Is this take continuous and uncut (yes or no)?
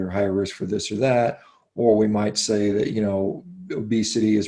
yes